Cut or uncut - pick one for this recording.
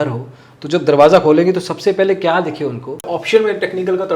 cut